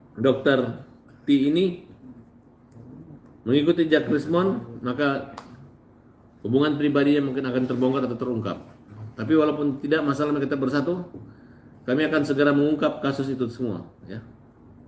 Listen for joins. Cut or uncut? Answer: uncut